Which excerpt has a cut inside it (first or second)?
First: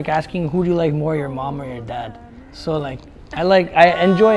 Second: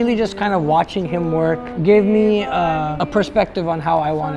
second